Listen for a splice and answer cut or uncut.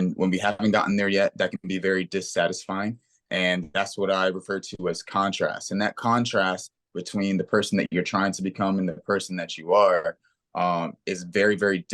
uncut